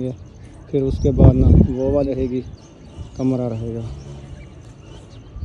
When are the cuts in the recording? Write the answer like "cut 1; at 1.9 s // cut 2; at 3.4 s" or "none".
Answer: cut 1; at 2.1 s